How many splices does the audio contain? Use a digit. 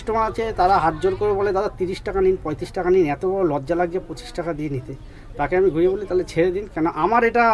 0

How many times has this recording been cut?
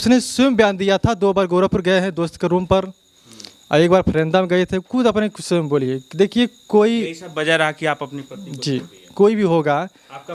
0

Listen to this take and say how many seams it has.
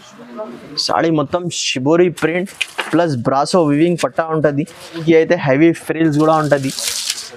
1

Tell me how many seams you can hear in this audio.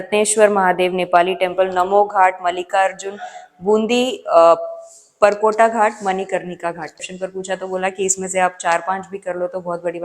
1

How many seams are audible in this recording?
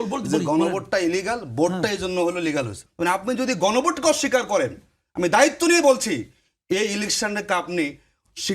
1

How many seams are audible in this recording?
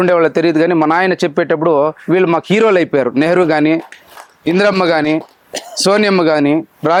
0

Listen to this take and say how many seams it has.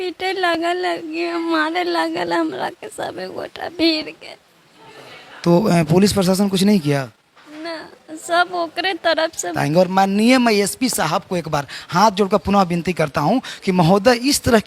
1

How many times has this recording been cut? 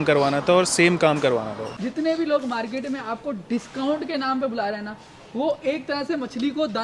1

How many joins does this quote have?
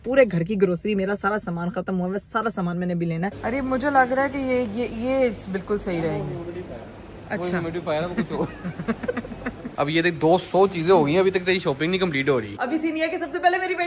3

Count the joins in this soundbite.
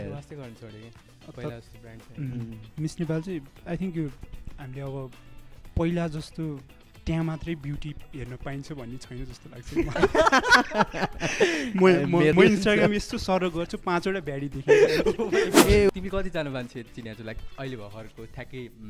2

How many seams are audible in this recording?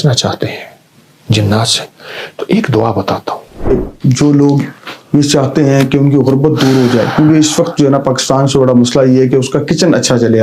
1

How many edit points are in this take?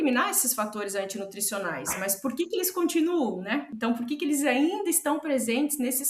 1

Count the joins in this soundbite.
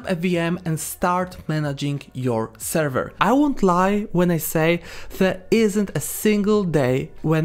1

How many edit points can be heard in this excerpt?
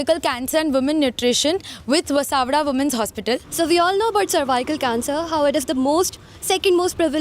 1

